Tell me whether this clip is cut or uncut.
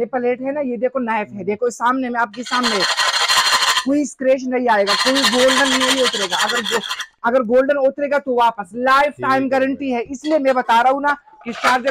uncut